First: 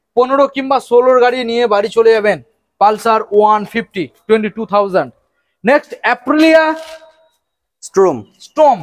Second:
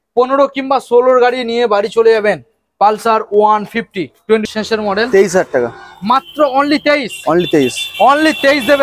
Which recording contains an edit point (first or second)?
second